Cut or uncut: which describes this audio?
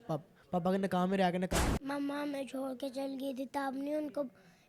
cut